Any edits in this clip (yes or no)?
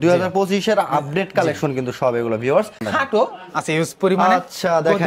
yes